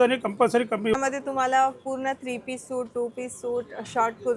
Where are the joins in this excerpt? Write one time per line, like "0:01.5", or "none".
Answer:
0:00.9

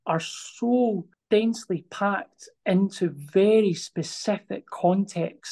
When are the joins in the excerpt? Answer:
0:01.1

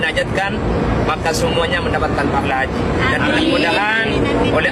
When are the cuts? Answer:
none

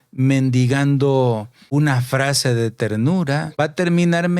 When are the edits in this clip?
0:01.5
0:03.5

